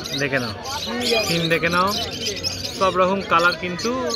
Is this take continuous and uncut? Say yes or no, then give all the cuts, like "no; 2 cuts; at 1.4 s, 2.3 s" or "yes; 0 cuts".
yes; 0 cuts